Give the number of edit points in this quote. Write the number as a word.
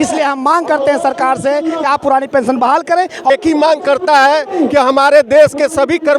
one